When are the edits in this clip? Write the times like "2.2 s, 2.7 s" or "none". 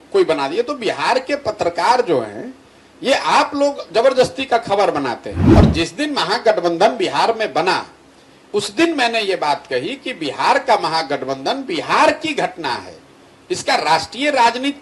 5.3 s

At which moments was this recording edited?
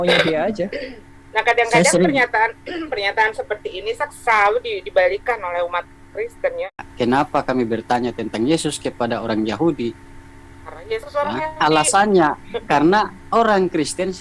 6.8 s

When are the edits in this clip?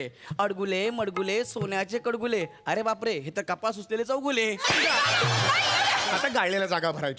6.1 s

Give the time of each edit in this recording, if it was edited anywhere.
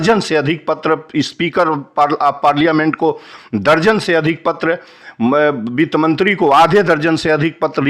none

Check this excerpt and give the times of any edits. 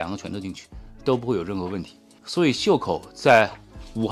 2.3 s

